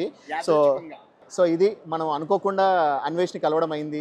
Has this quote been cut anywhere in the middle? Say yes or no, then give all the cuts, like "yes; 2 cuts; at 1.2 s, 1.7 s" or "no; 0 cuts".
yes; 1 cut; at 1.3 s